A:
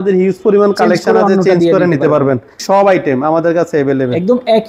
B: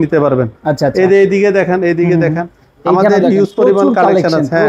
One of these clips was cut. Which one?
A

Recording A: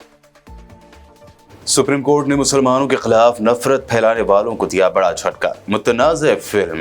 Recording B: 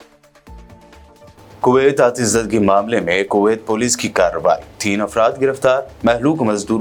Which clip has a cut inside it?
A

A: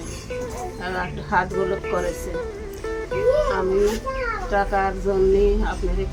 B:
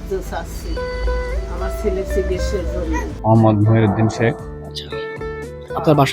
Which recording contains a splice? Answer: B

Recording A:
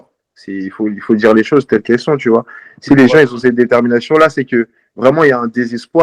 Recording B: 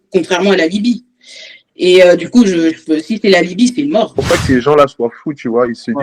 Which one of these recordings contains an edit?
B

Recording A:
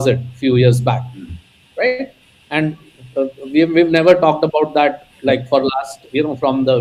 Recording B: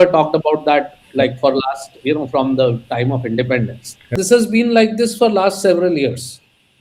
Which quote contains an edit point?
B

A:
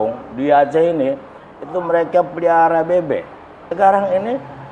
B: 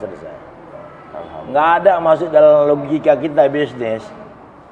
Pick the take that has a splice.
A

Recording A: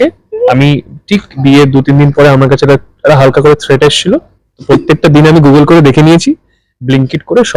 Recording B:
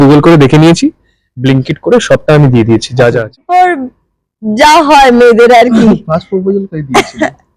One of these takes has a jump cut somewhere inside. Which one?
B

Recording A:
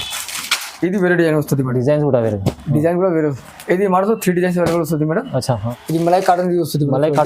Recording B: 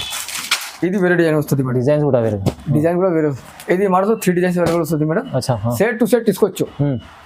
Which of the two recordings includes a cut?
A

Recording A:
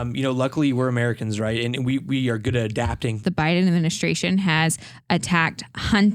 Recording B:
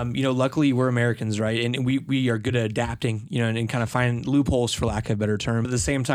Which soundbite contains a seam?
A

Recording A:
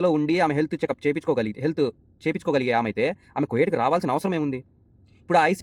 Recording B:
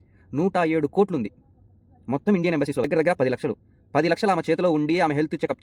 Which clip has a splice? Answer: B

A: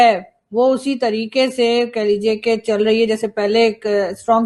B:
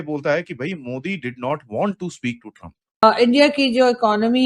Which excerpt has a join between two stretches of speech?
B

